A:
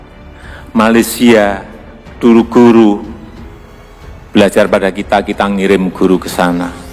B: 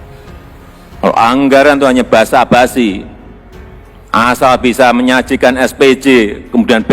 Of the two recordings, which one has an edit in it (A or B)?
B